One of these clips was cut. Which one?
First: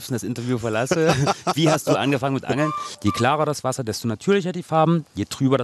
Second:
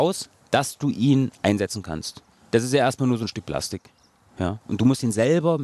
first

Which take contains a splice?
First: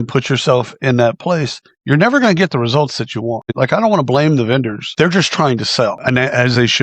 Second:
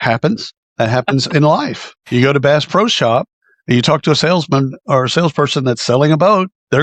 first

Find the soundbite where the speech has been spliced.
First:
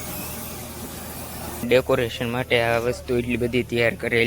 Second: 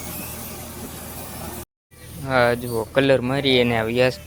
first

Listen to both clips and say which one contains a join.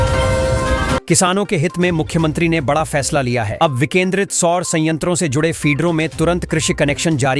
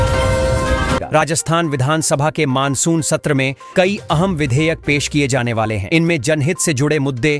first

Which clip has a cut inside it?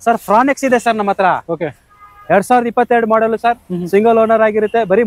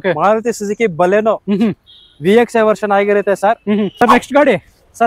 second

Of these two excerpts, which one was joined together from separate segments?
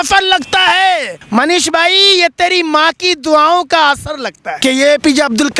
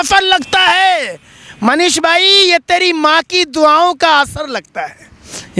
first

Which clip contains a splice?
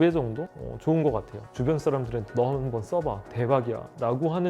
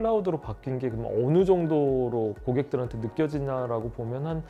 first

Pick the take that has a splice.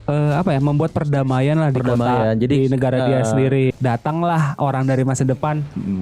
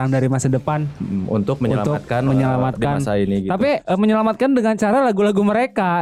first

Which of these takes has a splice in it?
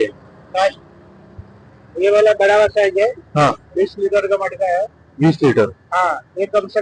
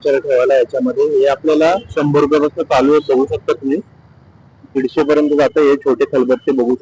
second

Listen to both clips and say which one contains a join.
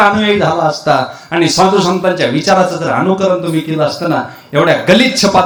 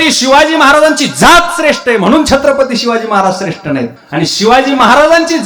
second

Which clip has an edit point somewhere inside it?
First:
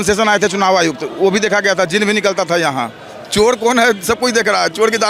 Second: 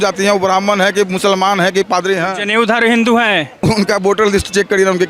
second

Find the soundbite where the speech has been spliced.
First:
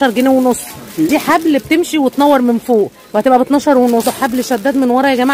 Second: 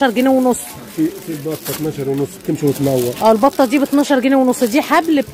first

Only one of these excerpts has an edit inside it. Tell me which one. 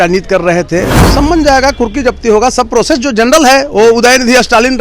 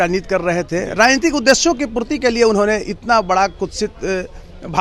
first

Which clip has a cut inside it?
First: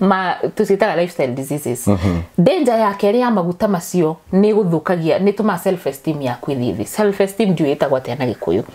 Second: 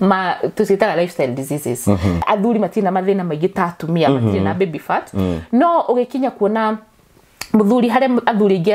second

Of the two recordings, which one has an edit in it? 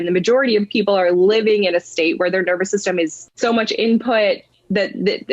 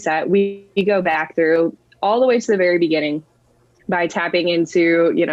first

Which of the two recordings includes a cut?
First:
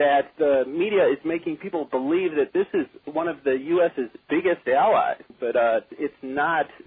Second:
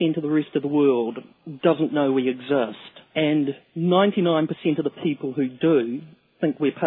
first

